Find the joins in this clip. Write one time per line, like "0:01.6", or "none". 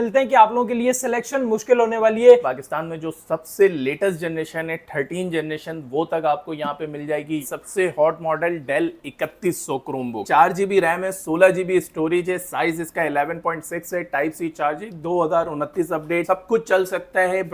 0:02.4
0:07.5
0:10.2
0:16.2